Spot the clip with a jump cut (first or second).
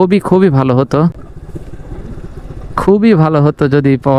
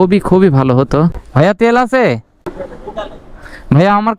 second